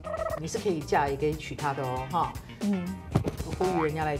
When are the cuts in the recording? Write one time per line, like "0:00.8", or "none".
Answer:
none